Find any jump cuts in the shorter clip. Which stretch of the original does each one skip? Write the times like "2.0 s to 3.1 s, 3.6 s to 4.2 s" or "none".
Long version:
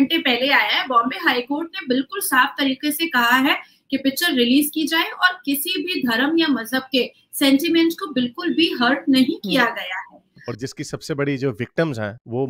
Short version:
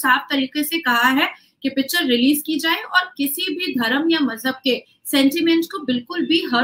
none